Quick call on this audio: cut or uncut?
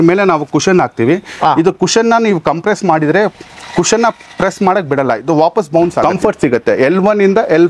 cut